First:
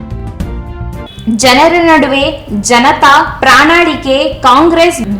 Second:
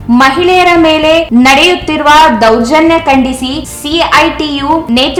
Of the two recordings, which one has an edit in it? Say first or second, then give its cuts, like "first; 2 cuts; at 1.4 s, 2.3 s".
first; 1 cut; at 1.1 s